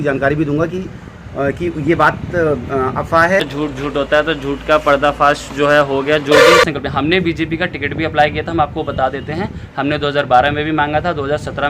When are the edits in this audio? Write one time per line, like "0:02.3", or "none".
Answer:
0:03.4
0:06.6